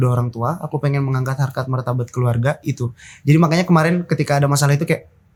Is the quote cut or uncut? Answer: uncut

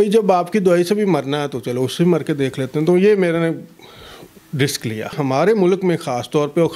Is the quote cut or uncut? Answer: uncut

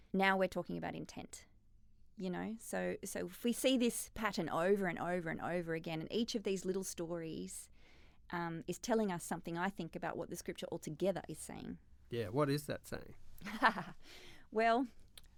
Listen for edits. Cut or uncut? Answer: uncut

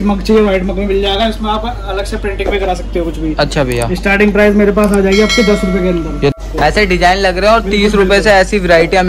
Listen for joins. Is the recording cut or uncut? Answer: cut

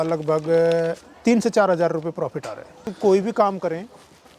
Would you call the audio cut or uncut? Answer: cut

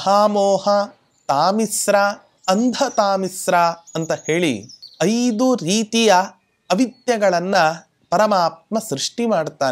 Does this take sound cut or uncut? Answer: uncut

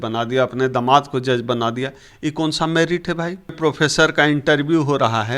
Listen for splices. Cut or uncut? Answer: cut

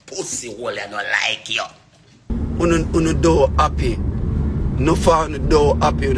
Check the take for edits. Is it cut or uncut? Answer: cut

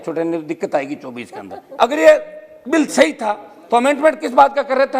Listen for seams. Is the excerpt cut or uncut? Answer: cut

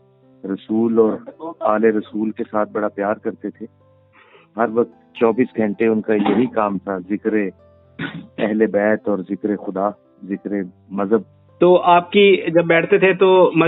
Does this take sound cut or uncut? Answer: uncut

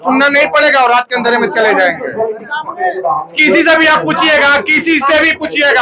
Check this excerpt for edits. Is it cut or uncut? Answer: uncut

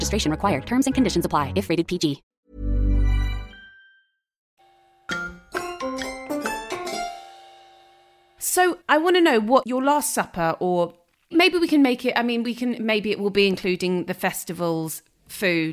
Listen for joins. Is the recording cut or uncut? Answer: uncut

